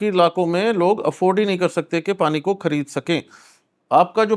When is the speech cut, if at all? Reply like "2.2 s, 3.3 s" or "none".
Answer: none